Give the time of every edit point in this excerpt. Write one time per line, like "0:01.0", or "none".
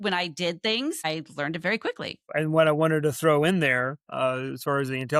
0:01.0
0:02.3